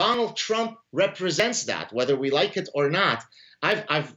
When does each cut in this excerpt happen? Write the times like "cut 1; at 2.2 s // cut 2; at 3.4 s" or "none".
none